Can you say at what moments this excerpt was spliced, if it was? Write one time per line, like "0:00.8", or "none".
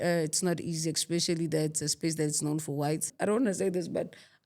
0:03.1